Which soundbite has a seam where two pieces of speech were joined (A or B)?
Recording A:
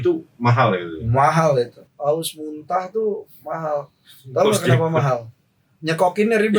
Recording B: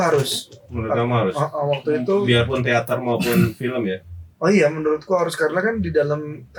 A